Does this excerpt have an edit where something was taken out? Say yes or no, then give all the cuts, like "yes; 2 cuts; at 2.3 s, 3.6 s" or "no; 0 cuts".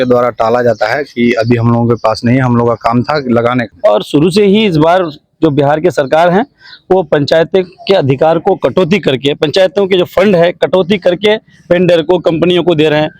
yes; 1 cut; at 3.7 s